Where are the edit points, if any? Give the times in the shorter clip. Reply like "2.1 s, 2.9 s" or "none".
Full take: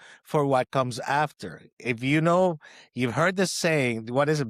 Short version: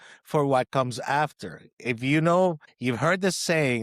2.7 s